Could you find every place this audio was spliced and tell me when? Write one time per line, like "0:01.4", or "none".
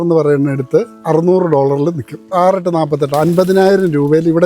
0:00.9
0:02.3